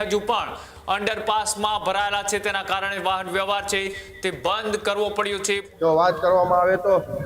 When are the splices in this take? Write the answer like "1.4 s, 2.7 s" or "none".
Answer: 5.6 s